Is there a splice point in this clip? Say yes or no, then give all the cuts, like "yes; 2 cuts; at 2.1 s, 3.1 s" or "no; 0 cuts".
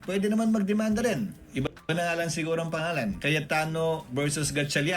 yes; 1 cut; at 3.7 s